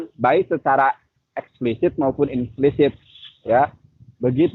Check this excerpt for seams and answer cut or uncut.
cut